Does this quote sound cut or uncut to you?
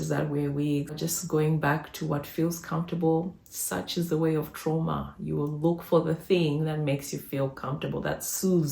cut